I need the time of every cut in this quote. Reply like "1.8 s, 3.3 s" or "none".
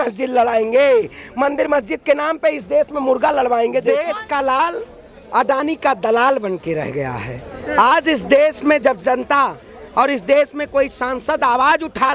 4.0 s